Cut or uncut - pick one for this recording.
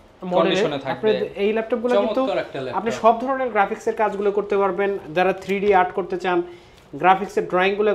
uncut